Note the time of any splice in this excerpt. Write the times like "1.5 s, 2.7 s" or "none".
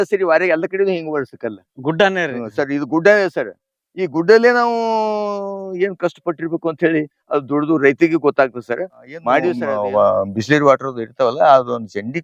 9.2 s